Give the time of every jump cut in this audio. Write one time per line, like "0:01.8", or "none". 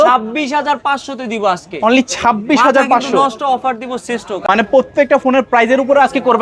0:04.4